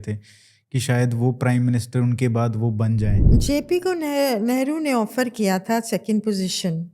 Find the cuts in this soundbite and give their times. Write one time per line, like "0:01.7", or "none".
0:03.2